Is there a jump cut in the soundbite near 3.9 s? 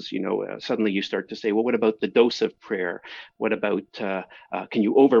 no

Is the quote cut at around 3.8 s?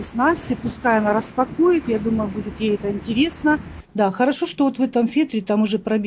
yes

